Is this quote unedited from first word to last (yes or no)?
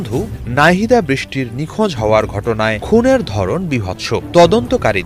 no